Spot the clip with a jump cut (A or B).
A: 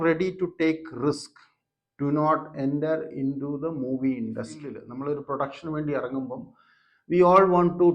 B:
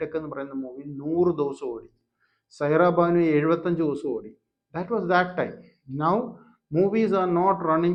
A